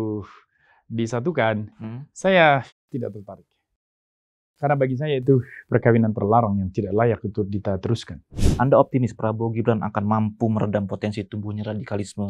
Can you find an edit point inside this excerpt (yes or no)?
yes